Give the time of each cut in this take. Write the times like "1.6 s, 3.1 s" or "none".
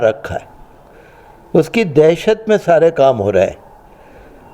none